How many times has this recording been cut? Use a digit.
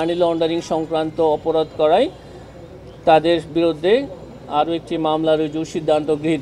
0